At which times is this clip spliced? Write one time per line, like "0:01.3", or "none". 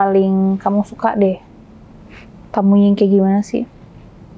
none